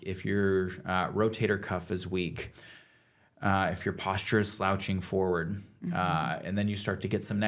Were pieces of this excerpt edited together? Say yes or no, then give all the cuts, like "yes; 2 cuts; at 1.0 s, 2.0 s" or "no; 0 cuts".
no; 0 cuts